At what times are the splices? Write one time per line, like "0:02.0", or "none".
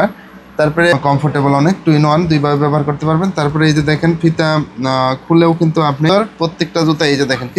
0:00.9
0:06.1